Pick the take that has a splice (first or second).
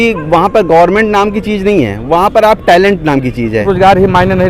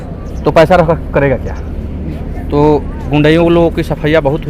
first